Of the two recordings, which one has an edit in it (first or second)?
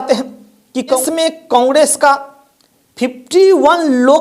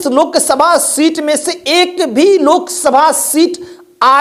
first